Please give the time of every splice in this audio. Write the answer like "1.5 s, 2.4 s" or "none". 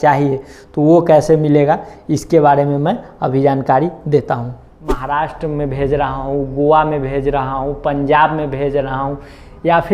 4.6 s